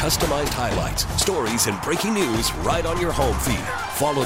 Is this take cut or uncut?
uncut